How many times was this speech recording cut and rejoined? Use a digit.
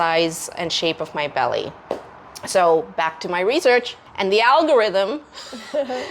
0